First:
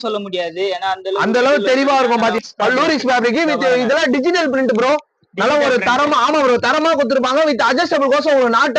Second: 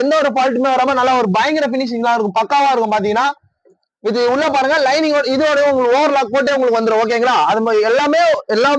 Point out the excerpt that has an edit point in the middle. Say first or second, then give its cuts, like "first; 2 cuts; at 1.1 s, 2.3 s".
first; 1 cut; at 2.4 s